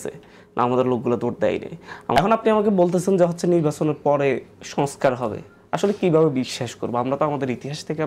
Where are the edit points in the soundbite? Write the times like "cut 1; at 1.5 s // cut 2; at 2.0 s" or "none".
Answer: cut 1; at 2.1 s